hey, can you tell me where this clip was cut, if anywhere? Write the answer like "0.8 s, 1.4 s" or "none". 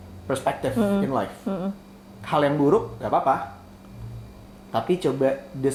none

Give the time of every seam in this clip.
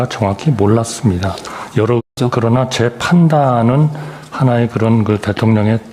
2.0 s

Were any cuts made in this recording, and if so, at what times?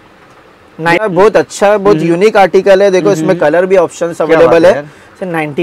1.0 s

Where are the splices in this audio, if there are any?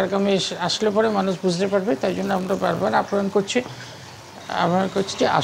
none

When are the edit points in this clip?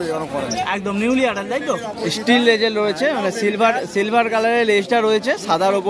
1.9 s

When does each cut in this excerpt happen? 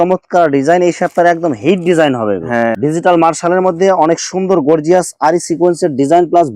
2.8 s

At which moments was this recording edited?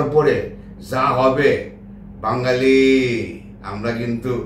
none

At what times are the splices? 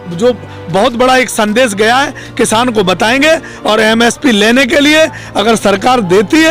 none

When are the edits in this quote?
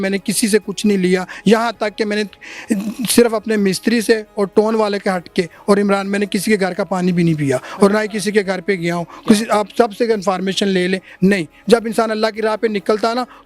none

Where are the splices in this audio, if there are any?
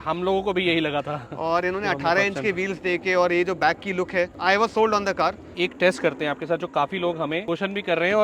4.3 s, 5.5 s, 7.4 s

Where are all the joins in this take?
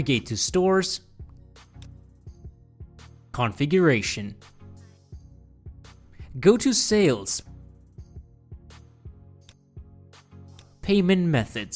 none

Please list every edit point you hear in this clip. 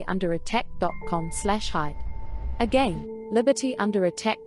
none

